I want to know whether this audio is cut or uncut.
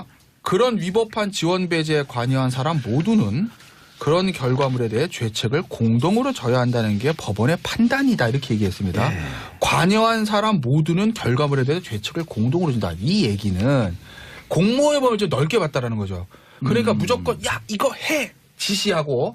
cut